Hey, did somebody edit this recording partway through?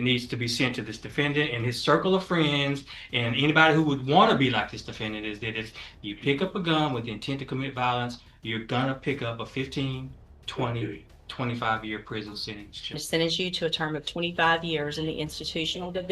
yes; 1 cut; at 13.0 s

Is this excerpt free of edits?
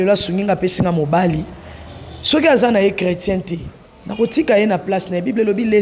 yes; 0 cuts

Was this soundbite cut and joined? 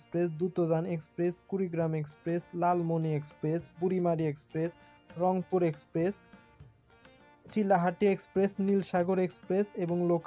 no; 0 cuts

